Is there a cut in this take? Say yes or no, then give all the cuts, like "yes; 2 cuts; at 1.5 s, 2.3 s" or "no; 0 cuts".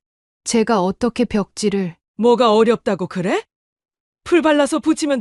yes; 1 cut; at 2.0 s